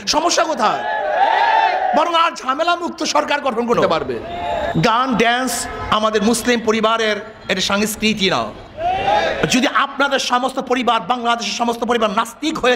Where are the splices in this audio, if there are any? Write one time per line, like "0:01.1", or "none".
0:04.7